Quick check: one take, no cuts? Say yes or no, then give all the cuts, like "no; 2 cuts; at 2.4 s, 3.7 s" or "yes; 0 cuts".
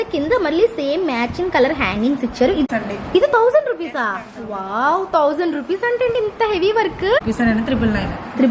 no; 2 cuts; at 2.7 s, 7.2 s